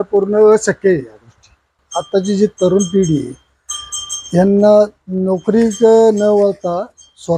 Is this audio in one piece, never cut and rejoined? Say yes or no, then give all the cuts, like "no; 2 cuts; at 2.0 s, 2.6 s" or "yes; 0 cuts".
no; 1 cut; at 1.8 s